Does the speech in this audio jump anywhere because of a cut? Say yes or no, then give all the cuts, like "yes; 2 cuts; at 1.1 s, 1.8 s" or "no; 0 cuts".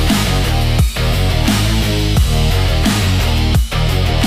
no; 0 cuts